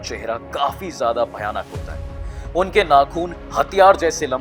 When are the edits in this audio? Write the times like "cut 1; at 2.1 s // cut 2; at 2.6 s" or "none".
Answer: none